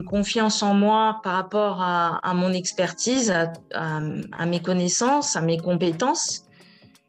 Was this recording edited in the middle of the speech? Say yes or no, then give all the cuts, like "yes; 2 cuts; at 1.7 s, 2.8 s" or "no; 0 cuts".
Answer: no; 0 cuts